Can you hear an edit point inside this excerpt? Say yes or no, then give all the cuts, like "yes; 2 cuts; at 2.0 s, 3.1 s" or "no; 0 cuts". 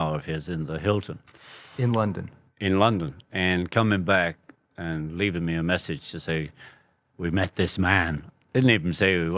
no; 0 cuts